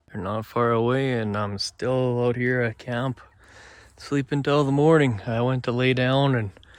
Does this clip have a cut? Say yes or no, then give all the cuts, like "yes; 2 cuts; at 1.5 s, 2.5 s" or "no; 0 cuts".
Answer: no; 0 cuts